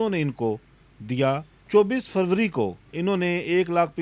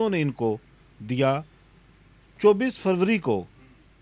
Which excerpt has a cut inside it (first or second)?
first